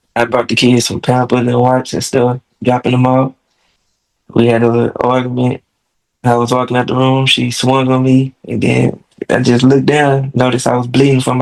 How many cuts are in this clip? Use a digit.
0